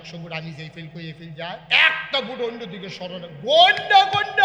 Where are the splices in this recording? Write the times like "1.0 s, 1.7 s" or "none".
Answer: 1.6 s

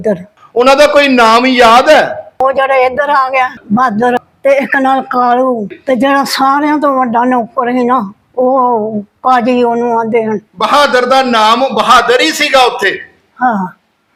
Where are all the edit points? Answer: none

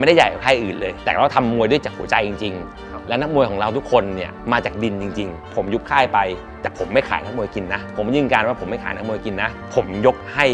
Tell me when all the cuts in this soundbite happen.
1.0 s, 4.4 s, 5.5 s, 7.9 s, 9.6 s

